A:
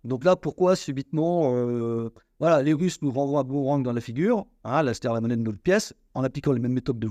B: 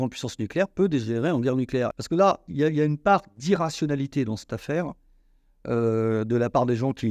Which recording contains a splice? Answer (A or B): B